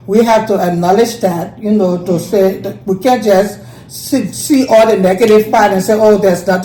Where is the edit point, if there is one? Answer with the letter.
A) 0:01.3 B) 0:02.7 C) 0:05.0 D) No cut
D